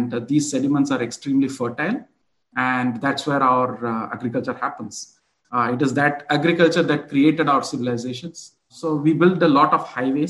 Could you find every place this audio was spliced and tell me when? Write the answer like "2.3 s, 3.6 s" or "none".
8.8 s

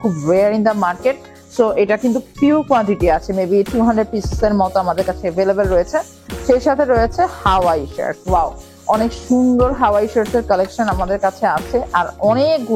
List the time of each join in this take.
none

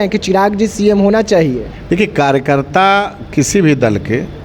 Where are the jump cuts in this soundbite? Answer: none

